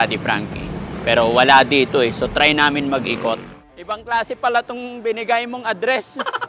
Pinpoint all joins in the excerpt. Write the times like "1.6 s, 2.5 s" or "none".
3.5 s